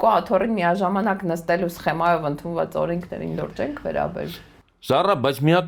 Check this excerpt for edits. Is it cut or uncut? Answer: uncut